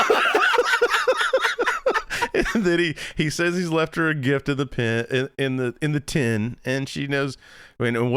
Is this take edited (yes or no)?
no